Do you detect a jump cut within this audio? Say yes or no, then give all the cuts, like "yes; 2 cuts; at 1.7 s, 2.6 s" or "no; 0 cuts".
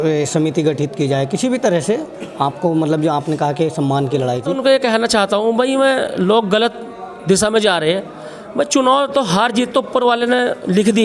yes; 1 cut; at 4.6 s